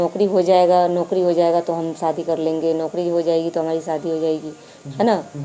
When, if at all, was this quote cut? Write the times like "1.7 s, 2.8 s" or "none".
none